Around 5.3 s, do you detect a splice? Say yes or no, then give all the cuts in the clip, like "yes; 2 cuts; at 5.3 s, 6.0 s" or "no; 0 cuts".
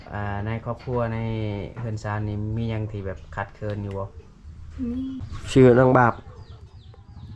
yes; 1 cut; at 5.3 s